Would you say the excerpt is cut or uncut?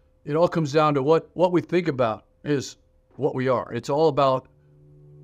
uncut